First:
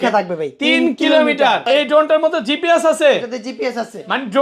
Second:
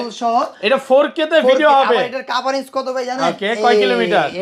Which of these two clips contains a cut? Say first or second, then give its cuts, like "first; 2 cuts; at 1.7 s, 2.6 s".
first; 1 cut; at 1.7 s